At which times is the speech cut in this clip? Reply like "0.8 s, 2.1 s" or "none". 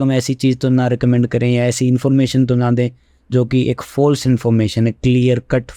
none